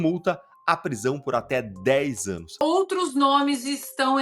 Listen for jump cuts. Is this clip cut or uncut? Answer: cut